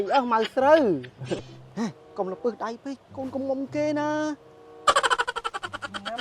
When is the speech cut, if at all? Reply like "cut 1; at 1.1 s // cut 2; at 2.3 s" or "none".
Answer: cut 1; at 1.5 s